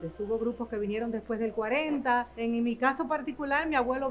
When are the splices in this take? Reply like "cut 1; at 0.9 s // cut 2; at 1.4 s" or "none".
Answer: cut 1; at 2.3 s

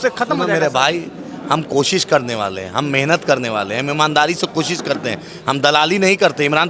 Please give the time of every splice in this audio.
none

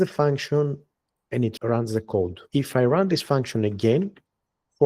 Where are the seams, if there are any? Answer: cut 1; at 2.4 s

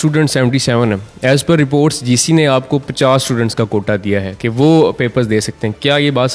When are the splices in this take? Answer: none

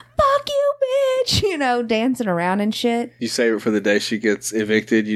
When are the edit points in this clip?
cut 1; at 3.2 s

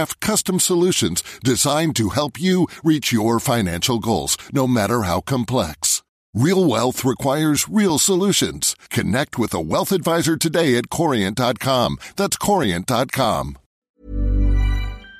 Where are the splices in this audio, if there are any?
cut 1; at 13.6 s

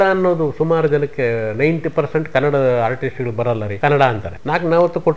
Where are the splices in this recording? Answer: cut 1; at 3.7 s // cut 2; at 4.3 s

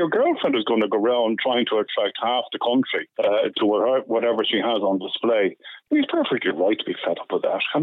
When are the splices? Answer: cut 1; at 3.0 s // cut 2; at 5.7 s

